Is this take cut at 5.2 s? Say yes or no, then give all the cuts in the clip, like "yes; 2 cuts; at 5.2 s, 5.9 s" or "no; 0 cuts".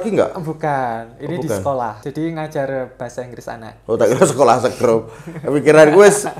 no; 1 cut; at 2.0 s